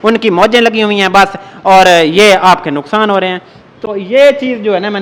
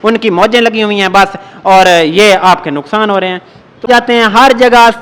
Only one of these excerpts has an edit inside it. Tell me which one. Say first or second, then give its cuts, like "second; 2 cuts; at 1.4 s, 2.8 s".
second; 1 cut; at 3.8 s